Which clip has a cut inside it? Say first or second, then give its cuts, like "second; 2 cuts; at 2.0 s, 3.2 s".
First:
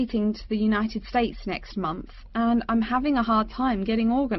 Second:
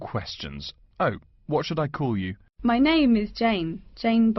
second; 1 cut; at 2.4 s